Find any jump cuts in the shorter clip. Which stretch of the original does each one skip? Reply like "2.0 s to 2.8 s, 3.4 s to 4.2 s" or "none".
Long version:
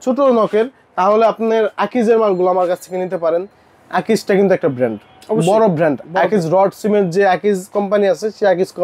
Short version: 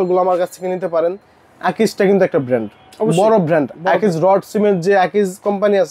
none